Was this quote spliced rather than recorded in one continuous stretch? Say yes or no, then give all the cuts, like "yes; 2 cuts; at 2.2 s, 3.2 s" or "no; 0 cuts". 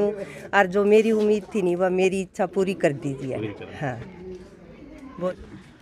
no; 0 cuts